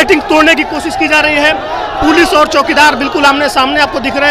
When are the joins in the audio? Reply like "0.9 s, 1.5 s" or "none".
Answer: none